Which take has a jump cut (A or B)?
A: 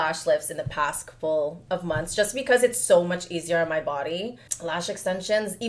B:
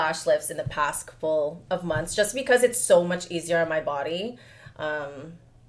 A